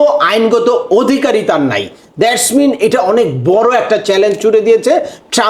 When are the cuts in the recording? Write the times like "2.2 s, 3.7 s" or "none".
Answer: none